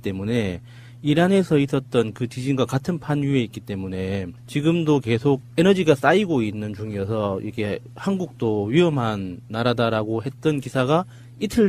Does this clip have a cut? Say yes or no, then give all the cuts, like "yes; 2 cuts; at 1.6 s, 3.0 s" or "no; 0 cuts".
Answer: yes; 1 cut; at 3.1 s